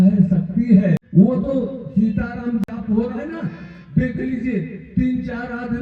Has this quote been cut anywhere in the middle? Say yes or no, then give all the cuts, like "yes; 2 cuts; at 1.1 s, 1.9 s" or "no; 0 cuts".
yes; 1 cut; at 1.0 s